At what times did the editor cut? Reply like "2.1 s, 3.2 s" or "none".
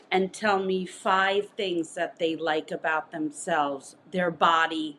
none